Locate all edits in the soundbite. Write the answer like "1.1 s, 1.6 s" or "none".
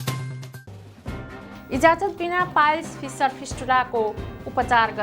1.3 s